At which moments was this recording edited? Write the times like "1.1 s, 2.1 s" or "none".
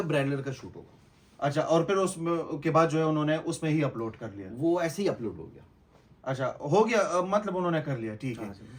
none